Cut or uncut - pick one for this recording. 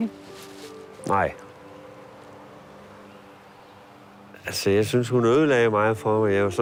uncut